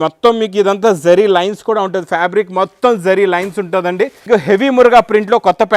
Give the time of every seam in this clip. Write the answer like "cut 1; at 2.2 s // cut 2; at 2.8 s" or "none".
cut 1; at 4.2 s